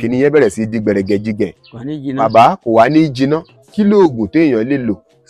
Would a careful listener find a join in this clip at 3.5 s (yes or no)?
yes